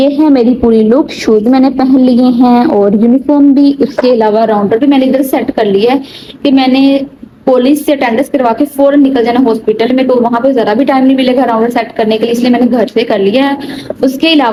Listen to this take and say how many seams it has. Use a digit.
0